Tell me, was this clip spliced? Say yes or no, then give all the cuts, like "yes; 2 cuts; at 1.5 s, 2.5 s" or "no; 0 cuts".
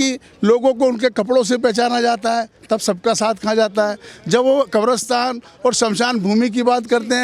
no; 0 cuts